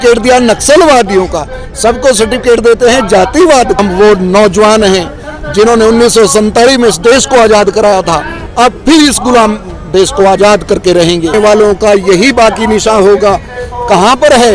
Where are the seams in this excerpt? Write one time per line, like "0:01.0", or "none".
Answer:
0:03.8
0:11.3